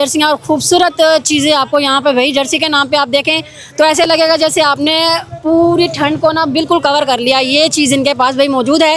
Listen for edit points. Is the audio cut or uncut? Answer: uncut